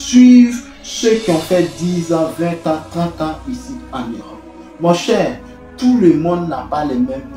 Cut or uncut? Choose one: uncut